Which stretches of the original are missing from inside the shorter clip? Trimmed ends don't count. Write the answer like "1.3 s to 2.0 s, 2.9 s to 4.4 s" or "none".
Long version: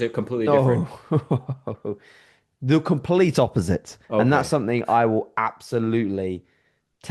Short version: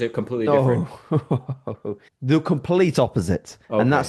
2.1 s to 2.5 s